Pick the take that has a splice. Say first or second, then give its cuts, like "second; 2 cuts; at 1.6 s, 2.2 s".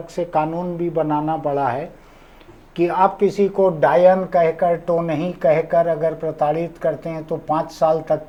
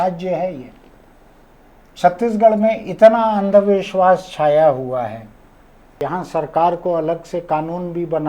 second; 1 cut; at 6.0 s